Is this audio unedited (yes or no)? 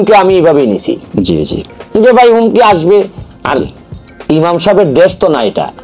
yes